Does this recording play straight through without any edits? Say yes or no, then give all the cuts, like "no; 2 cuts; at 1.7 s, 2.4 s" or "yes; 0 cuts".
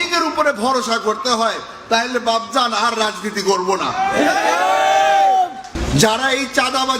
no; 1 cut; at 5.7 s